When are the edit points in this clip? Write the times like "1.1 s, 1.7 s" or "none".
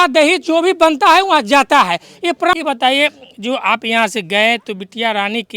2.6 s